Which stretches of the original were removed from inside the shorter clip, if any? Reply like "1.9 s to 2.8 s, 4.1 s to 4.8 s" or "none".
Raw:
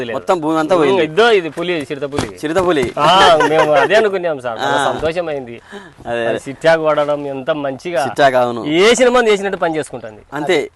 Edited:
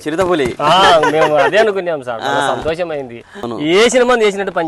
5.9 s to 8.6 s

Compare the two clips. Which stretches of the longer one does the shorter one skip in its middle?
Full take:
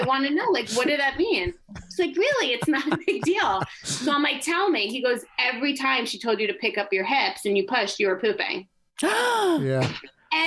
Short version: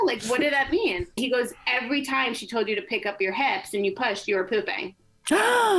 1.6 s to 4.9 s

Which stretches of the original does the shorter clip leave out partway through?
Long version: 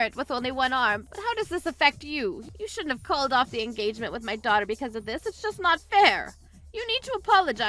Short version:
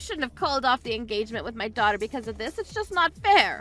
none

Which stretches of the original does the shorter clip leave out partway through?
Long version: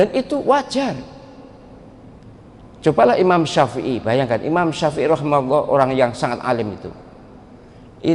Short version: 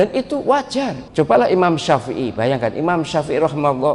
1.0 s to 2.7 s

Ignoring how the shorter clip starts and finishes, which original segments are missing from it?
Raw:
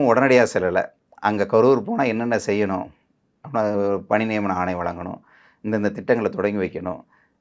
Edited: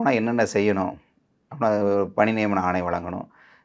none

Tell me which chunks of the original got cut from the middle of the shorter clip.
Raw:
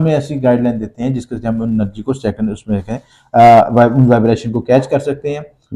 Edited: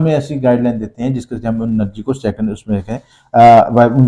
none

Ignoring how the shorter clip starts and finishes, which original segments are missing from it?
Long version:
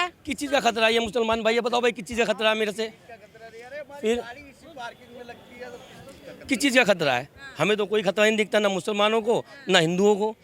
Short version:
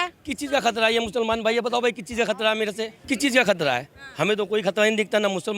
3.0 s to 6.4 s

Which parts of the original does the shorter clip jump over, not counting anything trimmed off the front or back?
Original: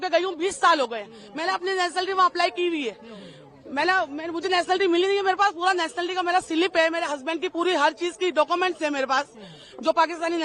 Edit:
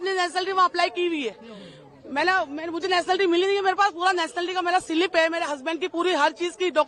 none

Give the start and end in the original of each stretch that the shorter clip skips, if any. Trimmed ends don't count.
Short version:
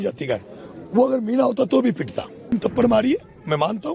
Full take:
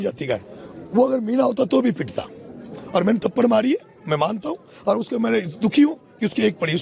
2.5 s to 3.1 s

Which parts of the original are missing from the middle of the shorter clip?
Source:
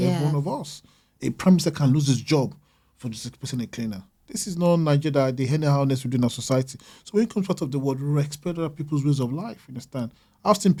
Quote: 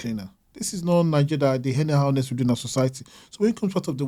none

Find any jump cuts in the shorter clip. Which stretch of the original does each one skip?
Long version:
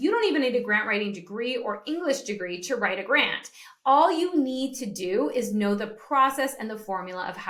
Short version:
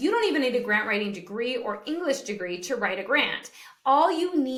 none

